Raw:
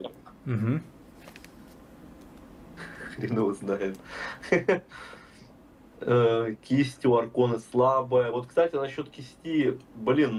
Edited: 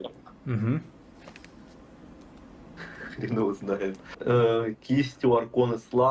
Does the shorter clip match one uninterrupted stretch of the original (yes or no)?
no